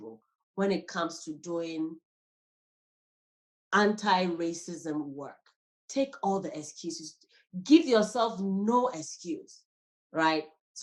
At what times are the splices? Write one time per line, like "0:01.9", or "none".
none